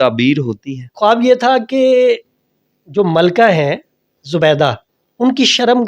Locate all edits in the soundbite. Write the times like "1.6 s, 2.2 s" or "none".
1.1 s